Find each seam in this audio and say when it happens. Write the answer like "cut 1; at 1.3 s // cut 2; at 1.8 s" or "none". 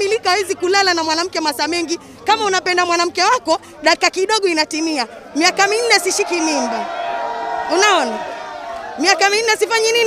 none

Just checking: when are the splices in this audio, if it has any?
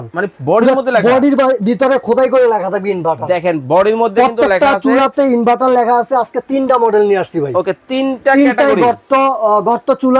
none

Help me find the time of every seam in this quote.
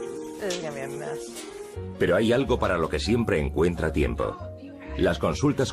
none

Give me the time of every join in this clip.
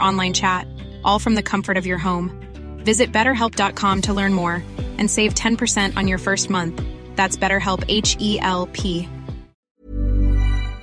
cut 1; at 9.5 s

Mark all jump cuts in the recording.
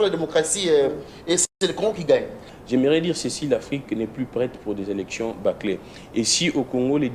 cut 1; at 2.4 s

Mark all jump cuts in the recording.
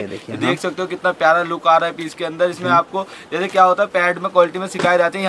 none

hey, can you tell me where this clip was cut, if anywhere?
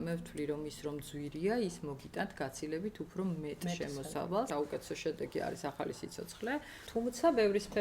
cut 1; at 4.5 s // cut 2; at 6.8 s

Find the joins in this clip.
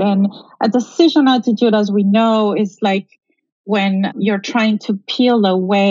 cut 1; at 4.1 s

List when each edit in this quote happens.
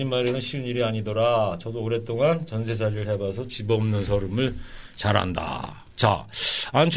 cut 1; at 2.7 s

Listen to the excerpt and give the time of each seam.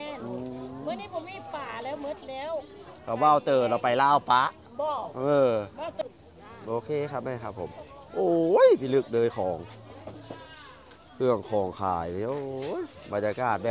cut 1; at 5.9 s

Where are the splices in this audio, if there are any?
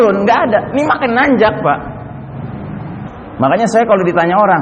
cut 1; at 3.1 s

